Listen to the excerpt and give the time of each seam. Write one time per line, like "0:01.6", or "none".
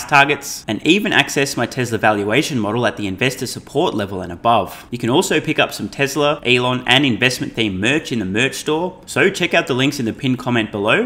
0:04.8
0:06.4
0:09.0